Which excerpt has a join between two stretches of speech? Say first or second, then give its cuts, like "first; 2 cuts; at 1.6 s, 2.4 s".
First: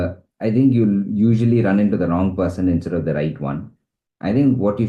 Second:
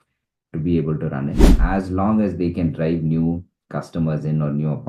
second; 1 cut; at 1.6 s